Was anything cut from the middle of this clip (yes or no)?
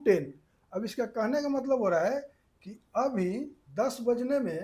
yes